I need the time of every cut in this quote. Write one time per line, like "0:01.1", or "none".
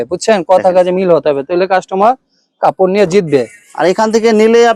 none